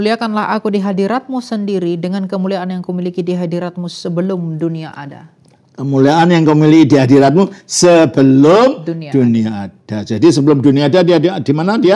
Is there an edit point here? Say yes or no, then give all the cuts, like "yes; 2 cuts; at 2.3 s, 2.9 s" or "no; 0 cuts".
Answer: no; 0 cuts